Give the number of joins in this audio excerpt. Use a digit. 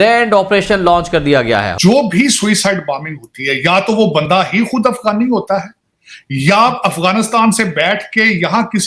1